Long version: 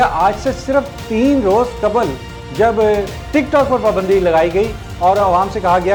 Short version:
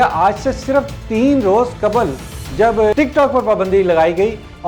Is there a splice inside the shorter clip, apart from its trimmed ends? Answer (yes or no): yes